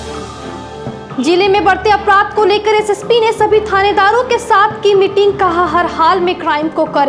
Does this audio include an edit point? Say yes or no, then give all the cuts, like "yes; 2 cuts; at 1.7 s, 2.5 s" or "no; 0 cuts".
yes; 1 cut; at 0.9 s